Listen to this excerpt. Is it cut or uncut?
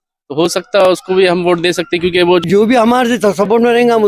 cut